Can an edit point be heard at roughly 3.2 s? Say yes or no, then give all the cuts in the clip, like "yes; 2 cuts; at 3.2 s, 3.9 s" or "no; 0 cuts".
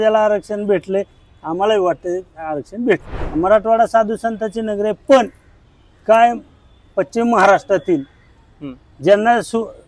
yes; 1 cut; at 3.2 s